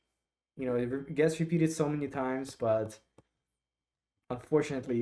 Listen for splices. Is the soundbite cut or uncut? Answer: uncut